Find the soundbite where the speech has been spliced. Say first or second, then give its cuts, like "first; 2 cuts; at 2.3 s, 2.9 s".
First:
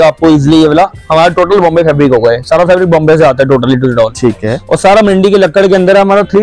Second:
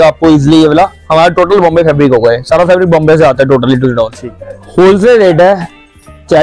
second; 1 cut; at 4.1 s